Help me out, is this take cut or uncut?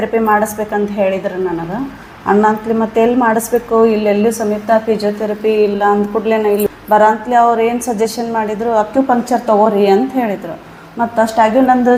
uncut